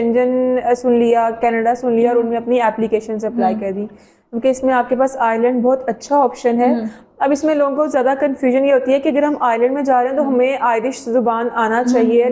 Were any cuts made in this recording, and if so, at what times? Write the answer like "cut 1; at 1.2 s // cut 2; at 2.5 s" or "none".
none